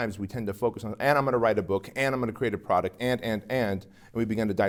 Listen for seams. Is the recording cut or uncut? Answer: uncut